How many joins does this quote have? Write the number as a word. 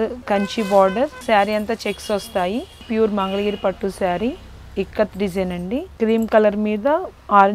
two